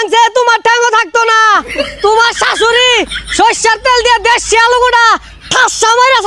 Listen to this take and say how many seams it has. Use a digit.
0